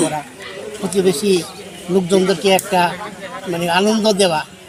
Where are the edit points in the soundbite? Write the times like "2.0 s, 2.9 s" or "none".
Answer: none